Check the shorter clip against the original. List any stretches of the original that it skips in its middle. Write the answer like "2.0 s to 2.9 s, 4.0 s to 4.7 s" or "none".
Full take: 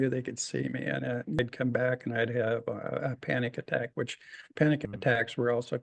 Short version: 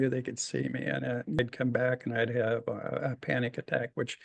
none